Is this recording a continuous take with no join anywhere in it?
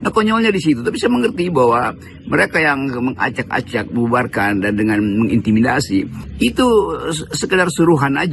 no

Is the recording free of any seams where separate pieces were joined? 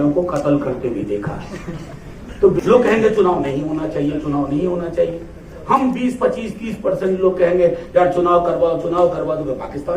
no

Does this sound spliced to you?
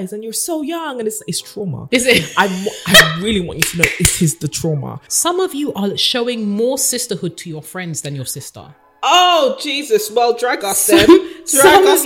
yes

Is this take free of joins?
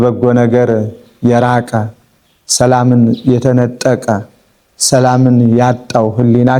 yes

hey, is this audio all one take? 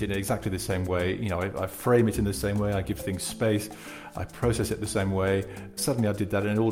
no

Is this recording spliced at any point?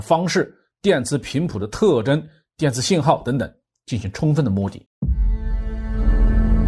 yes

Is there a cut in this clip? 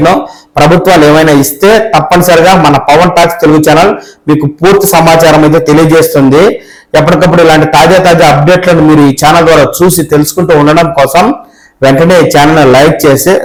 no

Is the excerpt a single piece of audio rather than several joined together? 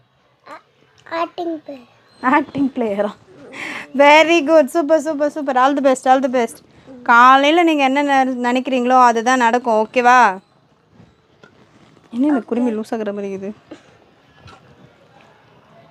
yes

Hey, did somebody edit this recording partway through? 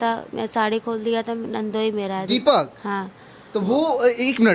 no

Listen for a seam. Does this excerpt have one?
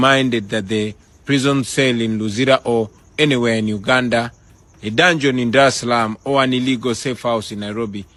no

